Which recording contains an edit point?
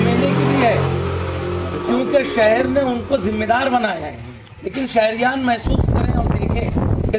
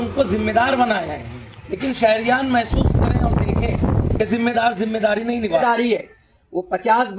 second; 1 cut; at 5.6 s

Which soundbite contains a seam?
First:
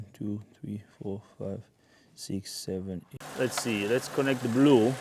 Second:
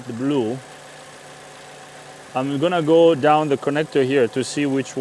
first; 1 cut; at 3.1 s

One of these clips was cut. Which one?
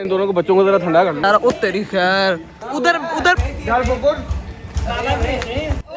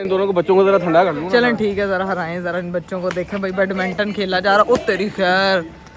first; 2 cuts; at 1.2 s, 2.5 s

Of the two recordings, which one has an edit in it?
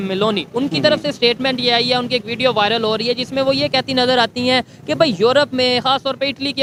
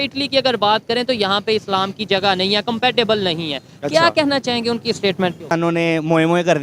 second; 1 cut; at 5.5 s

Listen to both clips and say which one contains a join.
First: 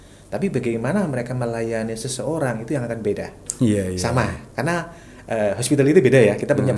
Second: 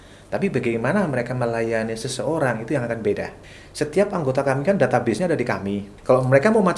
second; 2 cuts; at 3.4 s, 5.9 s

